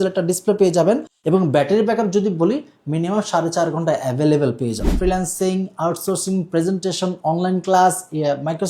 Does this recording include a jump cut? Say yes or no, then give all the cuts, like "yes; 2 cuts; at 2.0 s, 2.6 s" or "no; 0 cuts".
yes; 2 cuts; at 1.1 s, 4.9 s